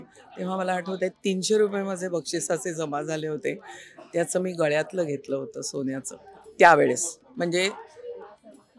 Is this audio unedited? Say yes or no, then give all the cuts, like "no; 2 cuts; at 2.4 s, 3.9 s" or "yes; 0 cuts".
yes; 0 cuts